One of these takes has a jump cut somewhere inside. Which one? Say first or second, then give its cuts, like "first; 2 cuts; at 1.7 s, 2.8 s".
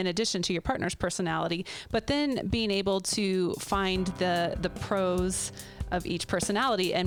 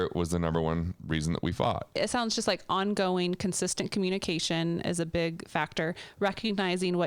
second; 1 cut; at 2.0 s